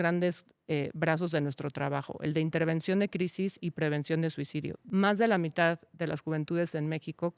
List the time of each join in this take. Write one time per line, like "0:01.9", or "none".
0:04.8